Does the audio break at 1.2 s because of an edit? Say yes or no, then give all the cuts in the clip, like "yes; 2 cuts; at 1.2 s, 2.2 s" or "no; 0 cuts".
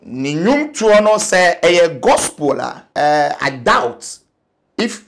no; 1 cut; at 2.8 s